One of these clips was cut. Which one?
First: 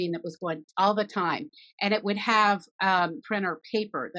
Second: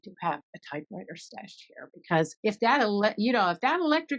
first; 1 cut; at 3.2 s

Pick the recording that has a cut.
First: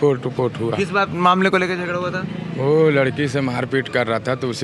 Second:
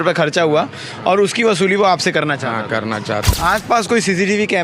second; 1 cut; at 3.3 s

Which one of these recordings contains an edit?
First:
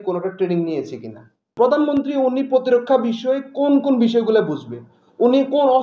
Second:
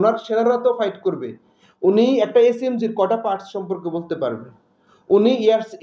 first; 1 cut; at 1.4 s

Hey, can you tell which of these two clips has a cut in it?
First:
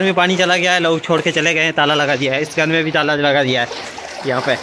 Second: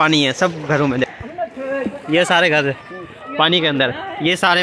second; 1 cut; at 1.2 s

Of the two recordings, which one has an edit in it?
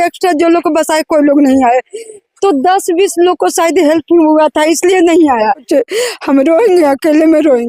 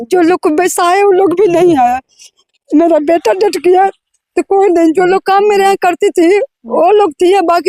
first; 1 cut; at 5.6 s

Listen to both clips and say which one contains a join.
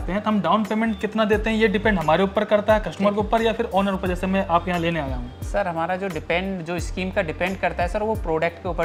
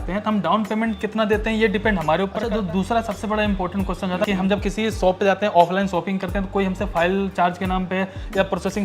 second; 2 cuts; at 2.4 s, 4.3 s

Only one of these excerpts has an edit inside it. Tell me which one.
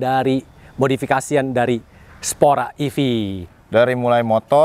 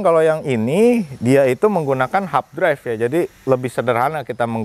first; 1 cut; at 3.5 s

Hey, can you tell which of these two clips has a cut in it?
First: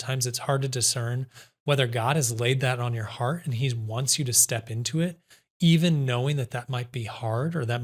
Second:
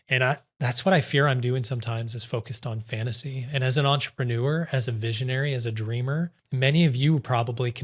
second; 1 cut; at 6.4 s

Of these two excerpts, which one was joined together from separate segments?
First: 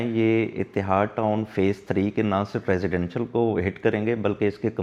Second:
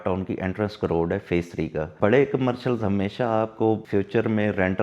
second; 2 cuts; at 1.9 s, 3.8 s

